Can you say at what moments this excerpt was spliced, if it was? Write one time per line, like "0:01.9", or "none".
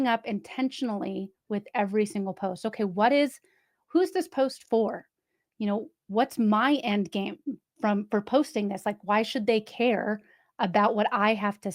none